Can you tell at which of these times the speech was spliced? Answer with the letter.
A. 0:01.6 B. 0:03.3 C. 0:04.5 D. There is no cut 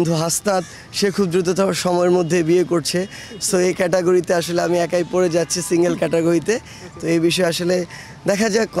D